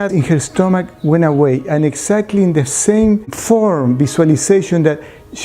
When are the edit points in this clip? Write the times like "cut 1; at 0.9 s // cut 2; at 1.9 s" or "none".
cut 1; at 3.4 s